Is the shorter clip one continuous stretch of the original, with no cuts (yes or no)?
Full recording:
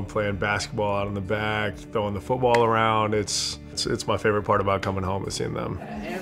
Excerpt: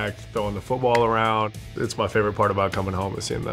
no